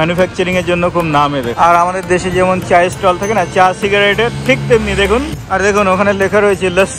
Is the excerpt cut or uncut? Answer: cut